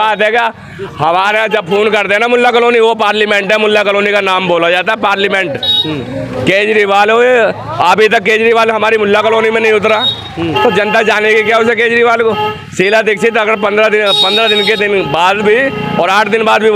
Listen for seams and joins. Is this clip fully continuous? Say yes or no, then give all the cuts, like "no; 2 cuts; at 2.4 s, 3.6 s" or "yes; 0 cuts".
yes; 0 cuts